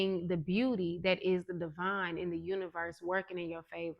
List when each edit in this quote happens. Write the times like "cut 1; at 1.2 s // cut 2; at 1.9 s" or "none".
none